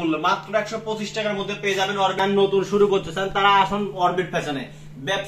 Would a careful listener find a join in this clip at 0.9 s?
no; 1 cut; at 2.2 s

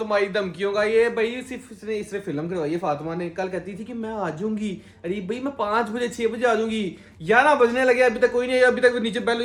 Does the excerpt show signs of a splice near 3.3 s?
no; 0 cuts

